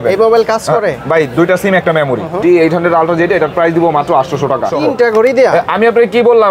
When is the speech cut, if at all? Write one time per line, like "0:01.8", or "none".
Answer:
0:02.3
0:04.7